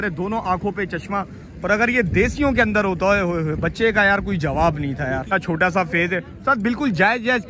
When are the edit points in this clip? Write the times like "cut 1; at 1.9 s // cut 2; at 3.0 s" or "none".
cut 1; at 5.3 s